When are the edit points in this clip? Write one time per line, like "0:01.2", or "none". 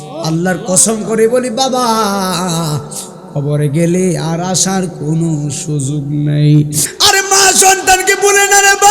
0:06.9